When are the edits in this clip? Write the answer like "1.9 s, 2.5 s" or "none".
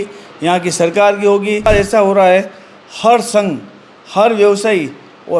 1.7 s